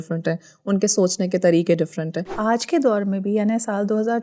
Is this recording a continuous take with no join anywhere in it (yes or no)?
no